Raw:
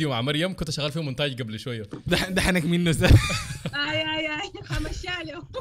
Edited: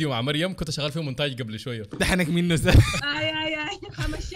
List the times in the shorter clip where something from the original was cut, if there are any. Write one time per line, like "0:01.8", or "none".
0:02.0
0:03.1